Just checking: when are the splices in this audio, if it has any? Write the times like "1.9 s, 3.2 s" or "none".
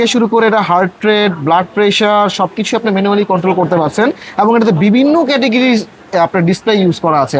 none